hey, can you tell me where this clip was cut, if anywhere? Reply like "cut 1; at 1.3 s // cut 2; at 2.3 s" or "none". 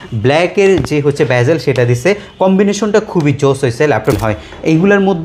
cut 1; at 4.2 s